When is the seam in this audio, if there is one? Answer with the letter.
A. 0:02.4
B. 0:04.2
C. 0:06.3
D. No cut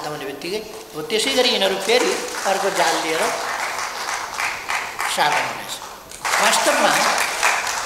C